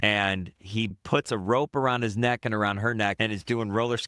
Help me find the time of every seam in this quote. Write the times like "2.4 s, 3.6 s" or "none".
0.9 s, 3.2 s